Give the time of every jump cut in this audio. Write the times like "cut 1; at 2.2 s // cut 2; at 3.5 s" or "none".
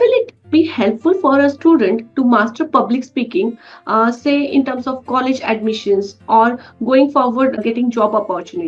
none